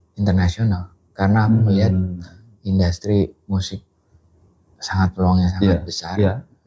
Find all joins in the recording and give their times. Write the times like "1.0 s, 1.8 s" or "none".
none